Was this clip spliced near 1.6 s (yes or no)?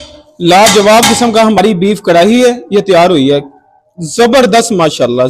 yes